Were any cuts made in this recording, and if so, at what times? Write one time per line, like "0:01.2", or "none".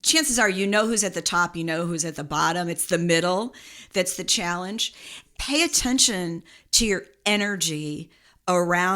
0:05.2

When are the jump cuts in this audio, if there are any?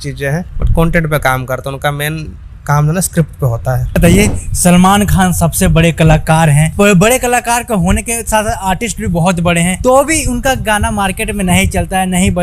0:04.0

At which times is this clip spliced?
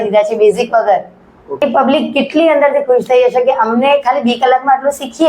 0:01.6

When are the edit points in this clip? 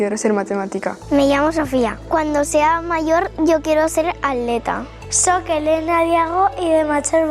0:01.0
0:05.0

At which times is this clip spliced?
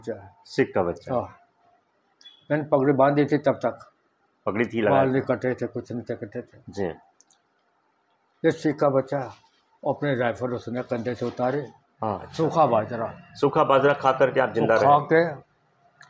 0:12.3

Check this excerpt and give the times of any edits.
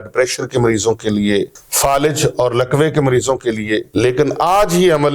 0:01.6
0:03.9

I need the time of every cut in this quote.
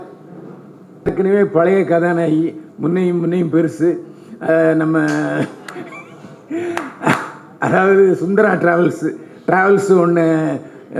0:01.1

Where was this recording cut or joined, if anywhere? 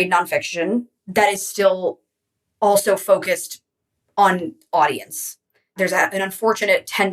0:01.0
0:05.7

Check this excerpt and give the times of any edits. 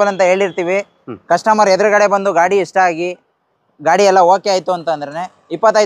none

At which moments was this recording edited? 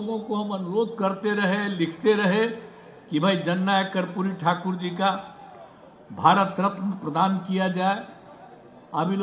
none

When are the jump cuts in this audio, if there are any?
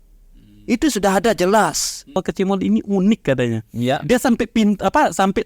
0:02.2

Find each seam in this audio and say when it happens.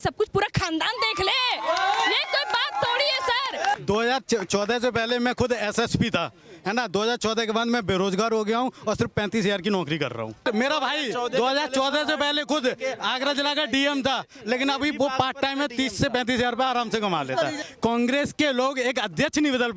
0:03.8
0:10.4
0:17.6

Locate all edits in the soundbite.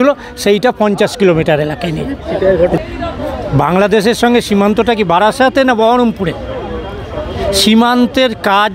0:02.8

